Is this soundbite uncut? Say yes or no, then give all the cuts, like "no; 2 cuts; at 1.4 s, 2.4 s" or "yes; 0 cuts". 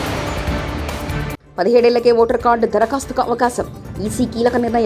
no; 1 cut; at 1.4 s